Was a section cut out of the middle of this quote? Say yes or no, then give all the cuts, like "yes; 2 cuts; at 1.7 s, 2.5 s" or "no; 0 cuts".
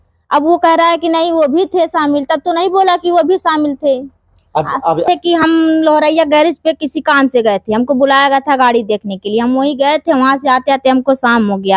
yes; 1 cut; at 5.1 s